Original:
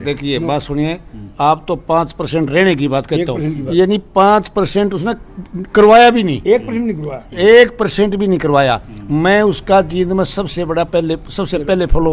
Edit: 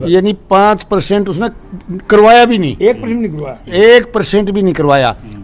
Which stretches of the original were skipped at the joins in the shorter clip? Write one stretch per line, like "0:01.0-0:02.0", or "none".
none